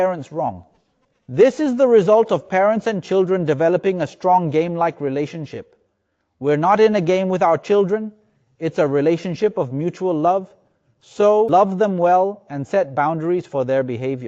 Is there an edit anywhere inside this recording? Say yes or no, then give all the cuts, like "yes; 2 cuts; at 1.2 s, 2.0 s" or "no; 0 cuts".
yes; 1 cut; at 11.5 s